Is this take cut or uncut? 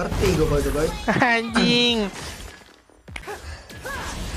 cut